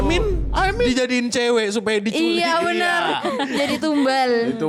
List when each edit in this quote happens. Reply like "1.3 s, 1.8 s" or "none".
none